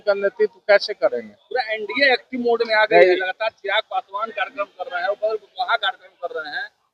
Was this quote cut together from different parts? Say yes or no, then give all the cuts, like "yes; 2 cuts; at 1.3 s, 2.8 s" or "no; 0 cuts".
no; 0 cuts